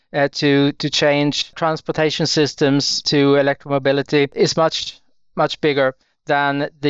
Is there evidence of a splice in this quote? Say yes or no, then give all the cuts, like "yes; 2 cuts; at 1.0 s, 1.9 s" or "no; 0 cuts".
yes; 3 cuts; at 1.5 s, 3.0 s, 4.3 s